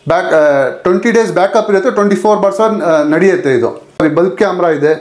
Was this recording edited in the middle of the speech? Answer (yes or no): yes